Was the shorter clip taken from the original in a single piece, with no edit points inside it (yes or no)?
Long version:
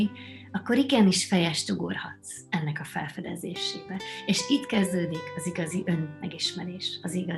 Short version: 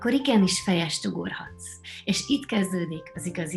no